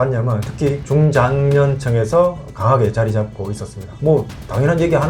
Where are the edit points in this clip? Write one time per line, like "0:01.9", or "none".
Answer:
none